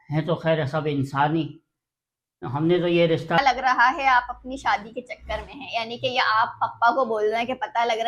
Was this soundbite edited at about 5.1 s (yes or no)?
no